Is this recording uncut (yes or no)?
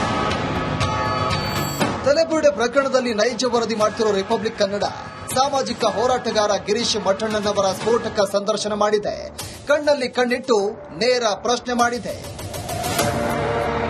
no